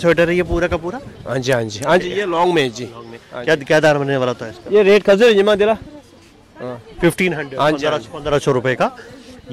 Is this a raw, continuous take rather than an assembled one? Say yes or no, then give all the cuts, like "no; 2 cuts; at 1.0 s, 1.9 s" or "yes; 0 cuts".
yes; 0 cuts